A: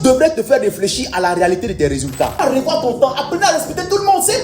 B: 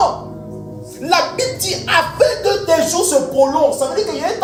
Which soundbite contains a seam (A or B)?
A